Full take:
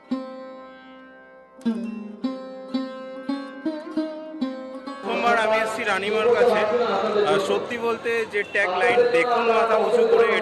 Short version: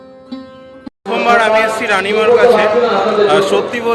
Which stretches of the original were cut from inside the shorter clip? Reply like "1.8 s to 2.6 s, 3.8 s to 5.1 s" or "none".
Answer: 3.4 s to 4.9 s